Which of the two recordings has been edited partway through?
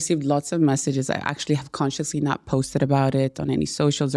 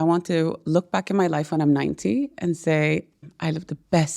second; 1 cut; at 3.2 s

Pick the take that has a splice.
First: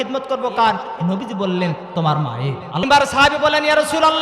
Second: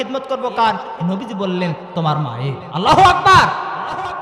first; 1 cut; at 2.8 s

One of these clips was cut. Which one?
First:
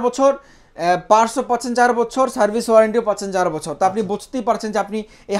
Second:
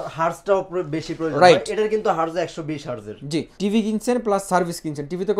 second; 1 cut; at 3.5 s

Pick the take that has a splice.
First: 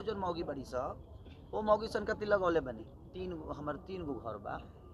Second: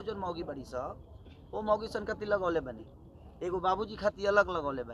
first; 1 cut; at 3.2 s

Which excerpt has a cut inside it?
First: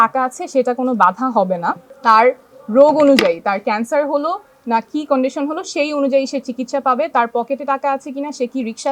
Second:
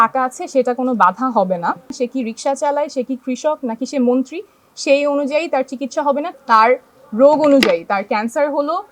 second; 2 cuts; at 1.9 s, 6.3 s

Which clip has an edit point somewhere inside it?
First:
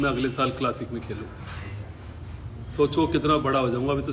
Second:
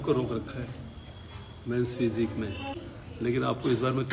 second; 1 cut; at 2.9 s

